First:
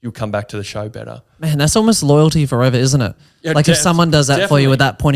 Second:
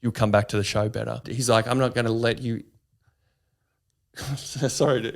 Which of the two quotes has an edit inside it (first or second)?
second